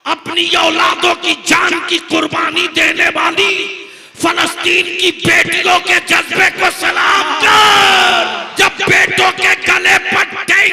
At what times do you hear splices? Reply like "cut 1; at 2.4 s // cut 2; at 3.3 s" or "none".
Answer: cut 1; at 8.5 s